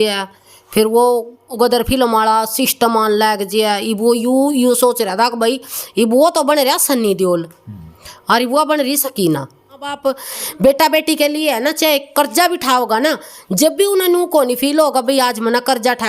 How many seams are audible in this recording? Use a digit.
1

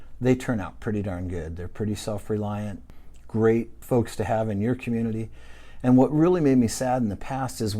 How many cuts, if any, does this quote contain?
1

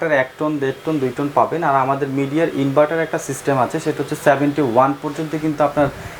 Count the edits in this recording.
0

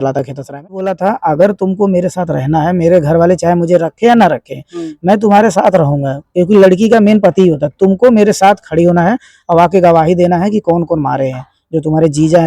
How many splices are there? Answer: 1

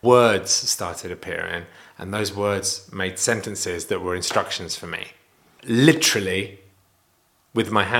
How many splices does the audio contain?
0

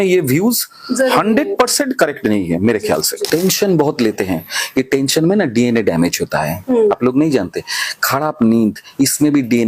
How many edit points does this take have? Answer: 1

